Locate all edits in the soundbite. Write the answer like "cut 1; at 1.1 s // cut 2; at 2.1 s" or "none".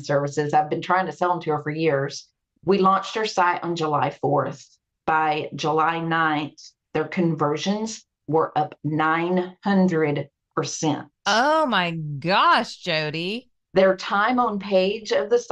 none